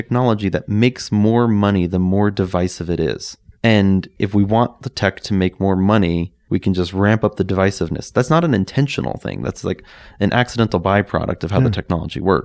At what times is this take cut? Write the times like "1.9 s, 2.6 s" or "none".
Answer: none